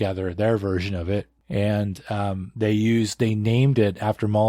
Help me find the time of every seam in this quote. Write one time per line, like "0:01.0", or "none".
0:01.4